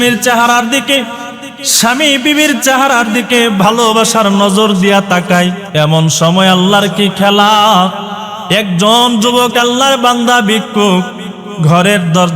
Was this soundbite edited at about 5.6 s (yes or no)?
yes